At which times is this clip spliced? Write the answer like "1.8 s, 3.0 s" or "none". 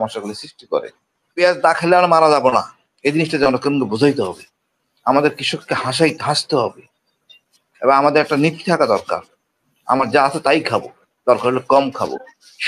1.3 s